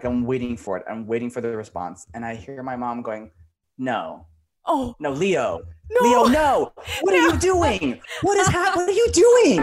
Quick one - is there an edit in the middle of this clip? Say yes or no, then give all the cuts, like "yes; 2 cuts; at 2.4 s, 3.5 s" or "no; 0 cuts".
no; 0 cuts